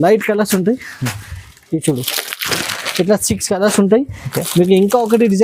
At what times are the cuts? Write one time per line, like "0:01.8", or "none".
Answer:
none